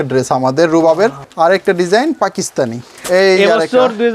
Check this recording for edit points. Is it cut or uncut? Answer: cut